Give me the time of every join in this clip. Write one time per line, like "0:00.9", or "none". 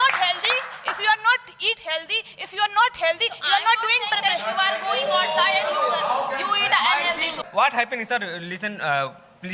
0:07.4